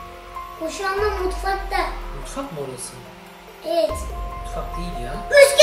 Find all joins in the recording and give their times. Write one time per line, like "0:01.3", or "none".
none

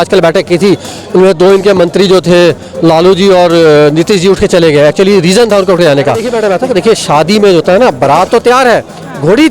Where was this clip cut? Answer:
0:06.3

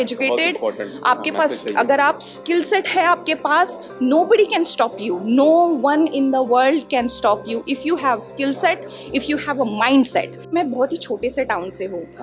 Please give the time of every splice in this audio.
0:10.5

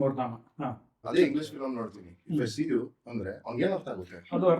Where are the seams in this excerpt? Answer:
0:01.0

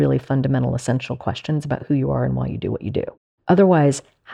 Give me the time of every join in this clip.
0:03.3

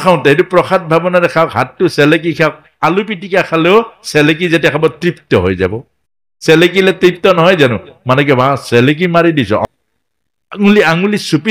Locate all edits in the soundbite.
0:09.6

